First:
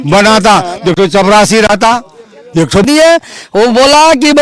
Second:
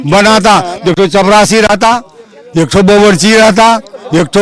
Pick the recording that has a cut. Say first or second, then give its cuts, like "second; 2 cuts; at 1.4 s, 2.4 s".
first; 1 cut; at 2.8 s